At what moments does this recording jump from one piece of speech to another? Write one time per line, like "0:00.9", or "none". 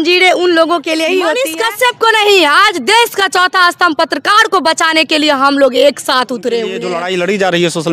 0:01.5
0:06.9